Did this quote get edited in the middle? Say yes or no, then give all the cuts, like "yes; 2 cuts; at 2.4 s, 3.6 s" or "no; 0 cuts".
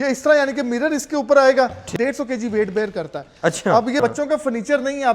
yes; 2 cuts; at 1.9 s, 4.0 s